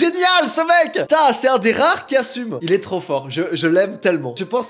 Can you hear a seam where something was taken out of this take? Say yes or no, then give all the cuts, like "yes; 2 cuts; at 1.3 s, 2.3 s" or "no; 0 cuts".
no; 0 cuts